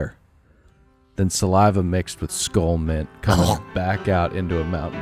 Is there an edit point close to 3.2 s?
no; 0 cuts

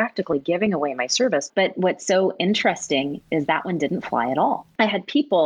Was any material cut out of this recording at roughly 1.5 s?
yes; 2 cuts; at 1.5 s, 4.7 s

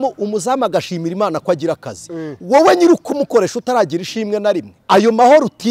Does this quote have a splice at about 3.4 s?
no; 1 cut; at 4.7 s

